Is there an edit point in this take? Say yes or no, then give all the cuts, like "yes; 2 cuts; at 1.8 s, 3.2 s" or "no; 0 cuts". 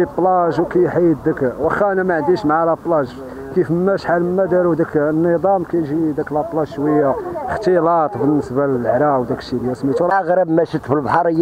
yes; 1 cut; at 10.1 s